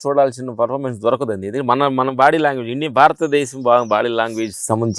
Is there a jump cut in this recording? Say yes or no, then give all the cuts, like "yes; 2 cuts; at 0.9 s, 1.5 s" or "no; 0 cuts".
no; 0 cuts